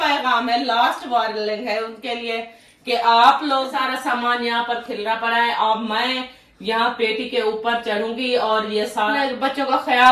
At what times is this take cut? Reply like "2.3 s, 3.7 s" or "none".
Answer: 3.7 s, 9.1 s